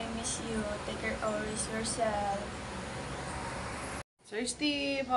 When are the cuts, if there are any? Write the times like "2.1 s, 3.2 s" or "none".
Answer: 4.1 s